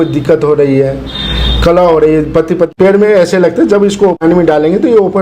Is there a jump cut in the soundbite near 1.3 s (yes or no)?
no